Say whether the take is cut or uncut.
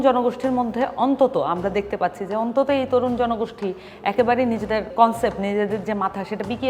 cut